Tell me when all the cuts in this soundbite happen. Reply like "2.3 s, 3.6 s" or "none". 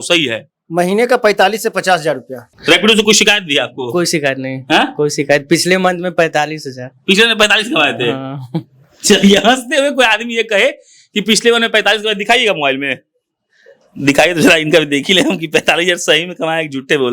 2.5 s